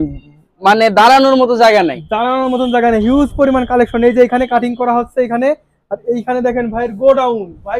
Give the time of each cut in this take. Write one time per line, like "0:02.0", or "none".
none